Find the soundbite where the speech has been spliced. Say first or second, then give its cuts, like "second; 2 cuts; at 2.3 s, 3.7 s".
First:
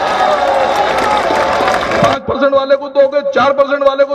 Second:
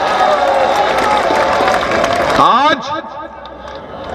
first; 1 cut; at 2.1 s